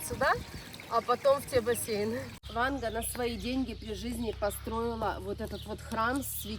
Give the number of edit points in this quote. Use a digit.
1